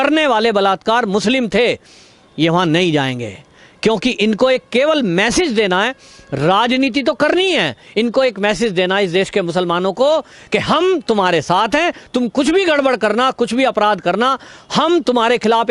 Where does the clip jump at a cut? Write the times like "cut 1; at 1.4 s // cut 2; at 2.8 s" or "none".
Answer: none